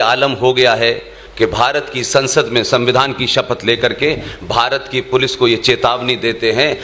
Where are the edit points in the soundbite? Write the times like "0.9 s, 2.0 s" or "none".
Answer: none